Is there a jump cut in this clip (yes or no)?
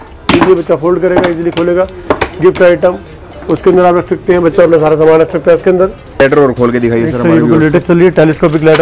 yes